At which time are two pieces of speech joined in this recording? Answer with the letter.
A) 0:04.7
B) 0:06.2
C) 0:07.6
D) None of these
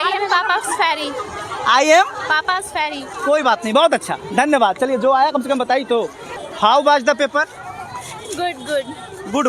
B